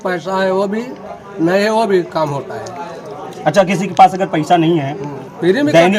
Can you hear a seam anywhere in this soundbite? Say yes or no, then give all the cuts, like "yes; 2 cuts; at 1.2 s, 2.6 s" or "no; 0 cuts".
no; 0 cuts